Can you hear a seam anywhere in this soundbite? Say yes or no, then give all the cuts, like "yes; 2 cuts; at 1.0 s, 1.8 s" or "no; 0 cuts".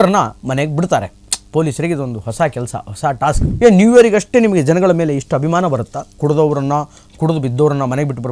yes; 1 cut; at 3.5 s